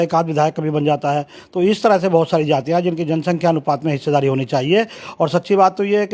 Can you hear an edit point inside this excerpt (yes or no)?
no